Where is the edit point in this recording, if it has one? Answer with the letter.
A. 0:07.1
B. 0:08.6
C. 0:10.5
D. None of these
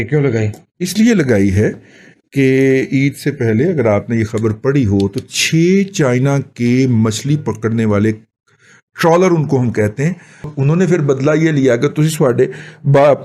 C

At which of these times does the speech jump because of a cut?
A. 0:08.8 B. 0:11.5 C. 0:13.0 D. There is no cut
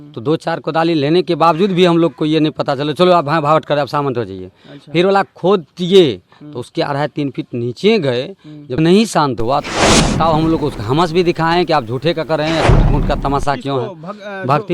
A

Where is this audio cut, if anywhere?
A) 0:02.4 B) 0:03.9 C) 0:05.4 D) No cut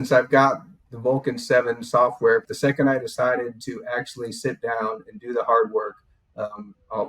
A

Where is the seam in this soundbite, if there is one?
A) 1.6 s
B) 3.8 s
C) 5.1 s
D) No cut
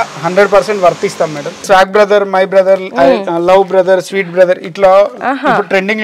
A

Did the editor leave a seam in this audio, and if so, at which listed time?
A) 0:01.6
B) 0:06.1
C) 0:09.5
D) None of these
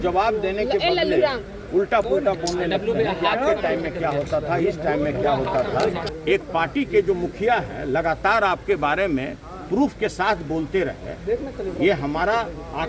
B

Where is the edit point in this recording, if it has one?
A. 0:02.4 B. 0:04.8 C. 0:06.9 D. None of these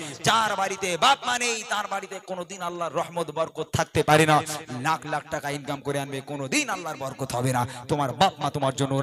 D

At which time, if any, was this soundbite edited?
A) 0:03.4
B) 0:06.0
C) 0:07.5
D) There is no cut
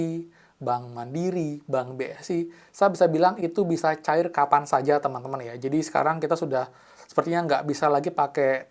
D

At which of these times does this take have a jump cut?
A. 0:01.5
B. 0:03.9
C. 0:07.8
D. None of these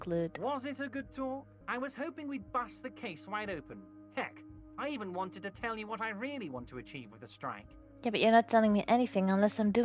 A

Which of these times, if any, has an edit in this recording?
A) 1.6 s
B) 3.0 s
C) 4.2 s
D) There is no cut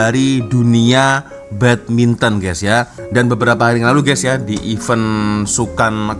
B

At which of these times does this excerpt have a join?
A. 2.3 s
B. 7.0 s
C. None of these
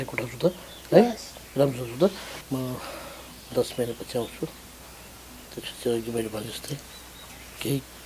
A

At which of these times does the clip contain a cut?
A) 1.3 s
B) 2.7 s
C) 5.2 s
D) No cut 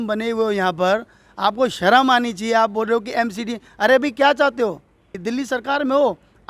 C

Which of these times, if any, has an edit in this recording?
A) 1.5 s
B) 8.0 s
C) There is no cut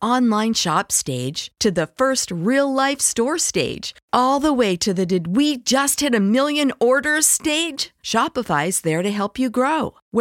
C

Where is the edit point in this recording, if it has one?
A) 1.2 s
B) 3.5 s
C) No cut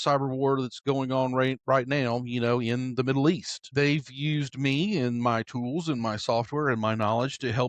B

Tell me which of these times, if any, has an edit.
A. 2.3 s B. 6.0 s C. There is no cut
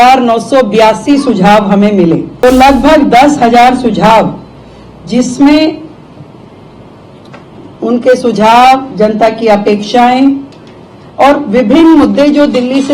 A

